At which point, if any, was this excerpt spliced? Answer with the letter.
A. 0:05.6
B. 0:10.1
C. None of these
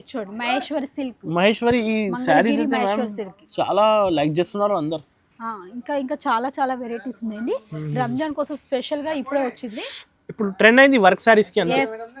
C